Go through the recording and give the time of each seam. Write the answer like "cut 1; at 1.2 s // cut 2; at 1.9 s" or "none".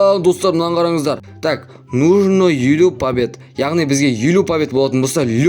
cut 1; at 1.3 s